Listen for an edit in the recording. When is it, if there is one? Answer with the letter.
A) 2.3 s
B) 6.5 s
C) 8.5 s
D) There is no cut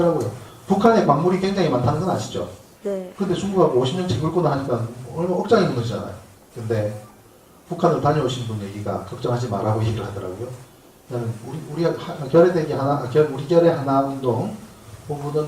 A